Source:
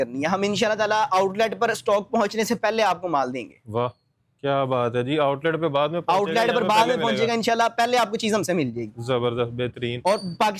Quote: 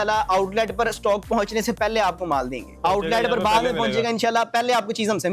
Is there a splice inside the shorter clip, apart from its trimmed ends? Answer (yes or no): yes